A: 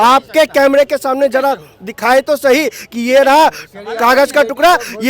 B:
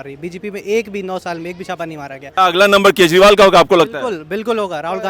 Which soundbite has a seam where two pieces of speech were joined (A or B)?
B